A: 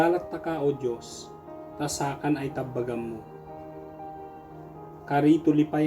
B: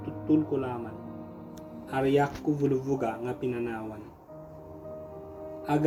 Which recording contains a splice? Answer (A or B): A